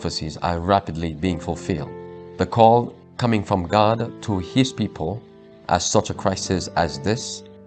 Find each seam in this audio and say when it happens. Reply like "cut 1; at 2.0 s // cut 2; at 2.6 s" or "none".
none

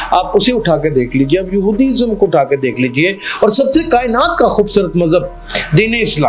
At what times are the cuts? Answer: none

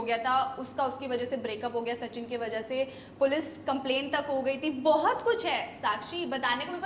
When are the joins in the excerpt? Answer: none

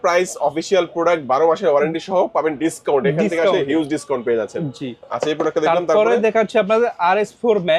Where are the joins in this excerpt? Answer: none

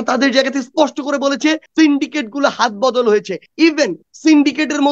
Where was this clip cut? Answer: cut 1; at 1.6 s // cut 2; at 3.7 s

